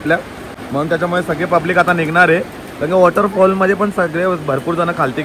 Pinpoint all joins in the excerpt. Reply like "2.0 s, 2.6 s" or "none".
none